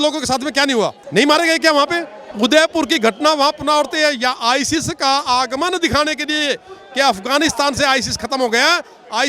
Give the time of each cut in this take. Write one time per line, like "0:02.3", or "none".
0:01.0
0:02.2